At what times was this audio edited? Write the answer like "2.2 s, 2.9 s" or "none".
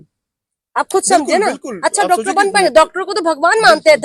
none